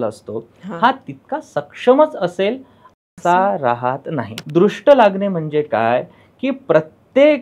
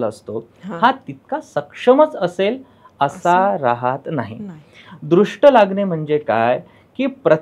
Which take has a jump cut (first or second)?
first